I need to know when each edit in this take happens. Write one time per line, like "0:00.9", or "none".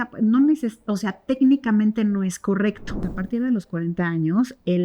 0:03.0